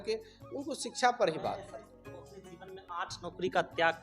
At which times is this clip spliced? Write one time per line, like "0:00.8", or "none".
0:01.9

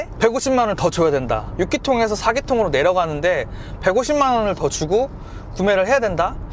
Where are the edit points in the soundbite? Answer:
0:01.5

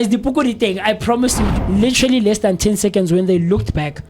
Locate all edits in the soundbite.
0:01.5

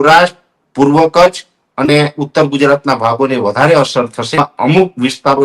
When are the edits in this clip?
0:04.4

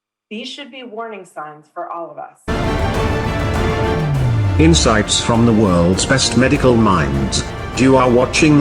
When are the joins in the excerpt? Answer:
0:02.5

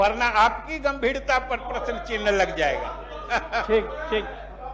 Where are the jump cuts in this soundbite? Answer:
none

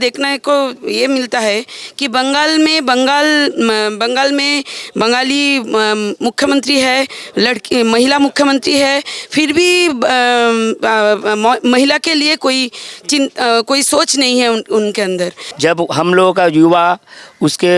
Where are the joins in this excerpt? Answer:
0:15.4

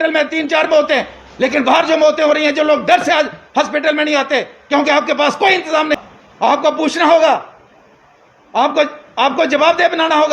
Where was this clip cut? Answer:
0:06.0

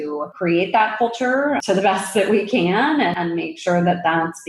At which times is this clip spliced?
0:01.6
0:03.2

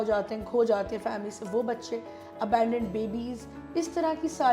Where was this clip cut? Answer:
none

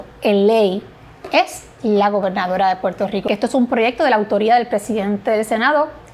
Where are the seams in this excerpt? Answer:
0:03.3

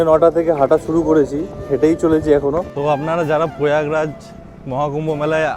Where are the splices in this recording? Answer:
0:02.7

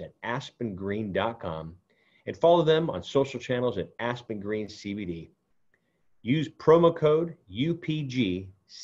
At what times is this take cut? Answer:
none

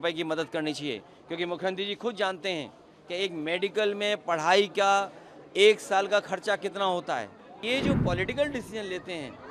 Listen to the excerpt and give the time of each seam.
0:07.6

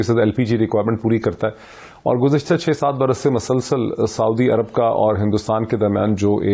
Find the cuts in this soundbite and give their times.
none

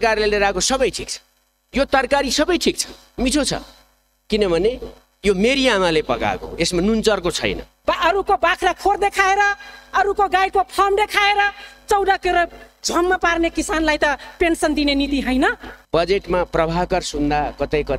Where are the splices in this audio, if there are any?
0:07.7
0:15.7

